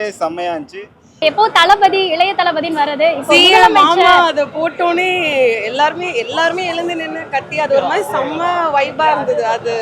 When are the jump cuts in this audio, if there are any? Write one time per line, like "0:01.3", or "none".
0:01.2